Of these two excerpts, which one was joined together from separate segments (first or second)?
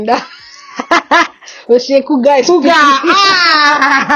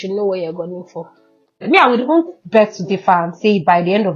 second